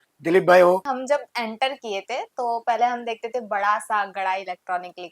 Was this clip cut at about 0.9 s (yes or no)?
yes